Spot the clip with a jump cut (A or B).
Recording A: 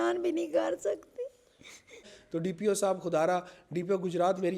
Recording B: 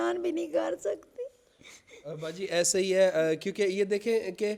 A